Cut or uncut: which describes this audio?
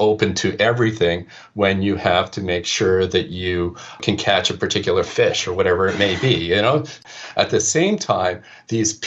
cut